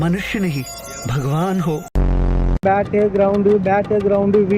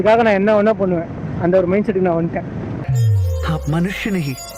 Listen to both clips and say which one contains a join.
first; 1 cut; at 2.6 s

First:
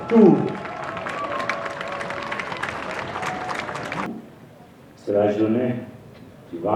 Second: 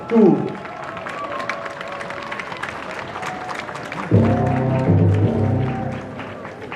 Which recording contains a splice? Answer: first; 1 cut; at 4.1 s

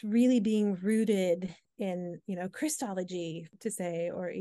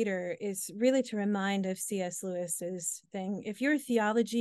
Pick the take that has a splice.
first; 2 cuts; at 1.6 s, 3.5 s

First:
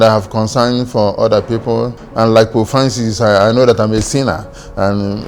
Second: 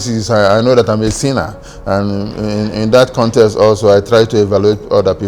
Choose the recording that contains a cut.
first; 1 cut; at 2.0 s

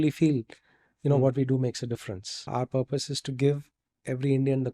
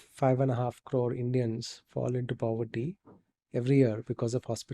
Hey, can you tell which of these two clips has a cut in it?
first; 1 cut; at 2.3 s

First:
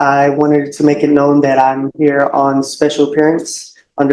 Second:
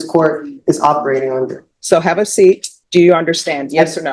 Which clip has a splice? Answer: second; 2 cuts; at 1.7 s, 2.7 s

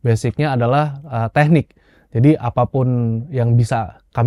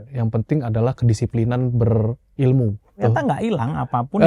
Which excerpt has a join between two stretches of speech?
second; 1 cut; at 3.0 s

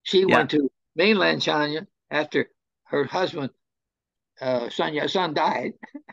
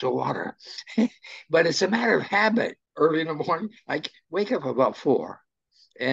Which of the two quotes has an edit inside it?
second; 1 cut; at 2.8 s

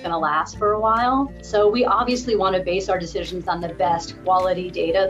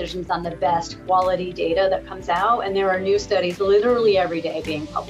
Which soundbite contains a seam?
first; 1 cut; at 1.4 s

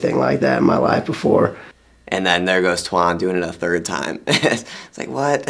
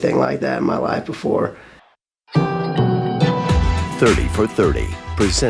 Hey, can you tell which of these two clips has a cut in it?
first; 1 cut; at 2.0 s

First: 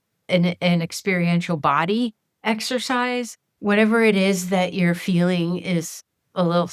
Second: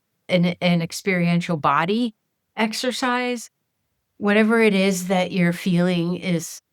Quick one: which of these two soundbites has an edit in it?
first; 2 cuts; at 2.3 s, 3.4 s

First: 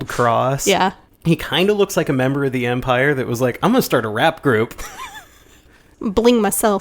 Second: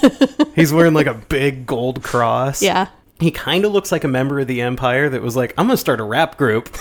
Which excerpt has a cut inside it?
first; 1 cut; at 5.9 s

